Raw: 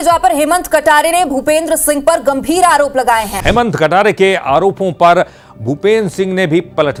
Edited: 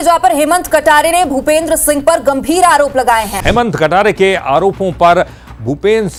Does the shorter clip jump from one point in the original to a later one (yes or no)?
no